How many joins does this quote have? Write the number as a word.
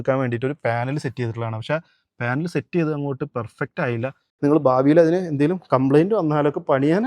one